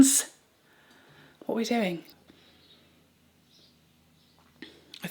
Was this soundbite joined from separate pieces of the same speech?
yes; 1 cut; at 2.1 s

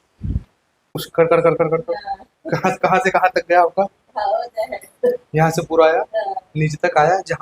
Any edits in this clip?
yes; 1 cut; at 1.1 s

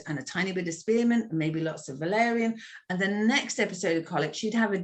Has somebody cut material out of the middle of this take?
no; 0 cuts

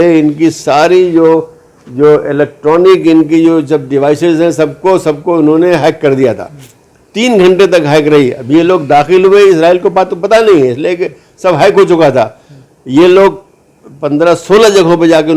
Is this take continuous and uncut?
yes; 0 cuts

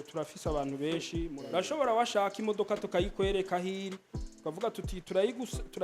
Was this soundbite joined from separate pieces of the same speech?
yes; 1 cut; at 1.4 s

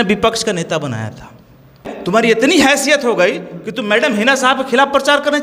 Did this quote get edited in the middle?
yes; 1 cut; at 1.9 s

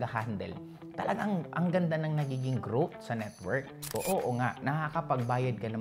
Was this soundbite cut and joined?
yes; 1 cut; at 3.9 s

